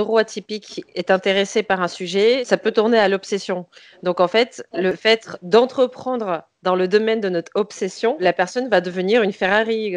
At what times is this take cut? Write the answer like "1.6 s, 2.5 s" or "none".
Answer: 2.4 s, 5.0 s, 8.2 s